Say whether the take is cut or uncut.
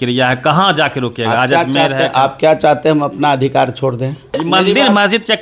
cut